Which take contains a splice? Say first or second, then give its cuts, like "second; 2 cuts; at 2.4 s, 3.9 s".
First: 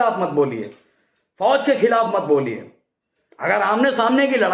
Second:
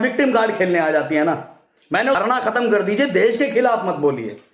second; 1 cut; at 2.2 s